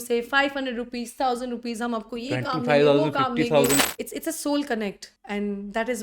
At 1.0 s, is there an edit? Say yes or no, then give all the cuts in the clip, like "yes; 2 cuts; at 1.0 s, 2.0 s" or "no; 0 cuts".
no; 2 cuts; at 3.8 s, 5.1 s